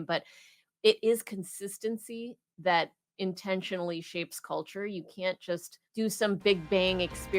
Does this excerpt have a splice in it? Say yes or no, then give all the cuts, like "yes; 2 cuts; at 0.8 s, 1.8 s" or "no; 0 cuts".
yes; 1 cut; at 5.8 s